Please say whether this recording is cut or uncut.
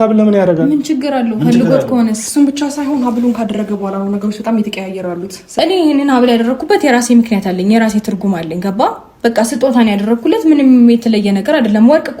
cut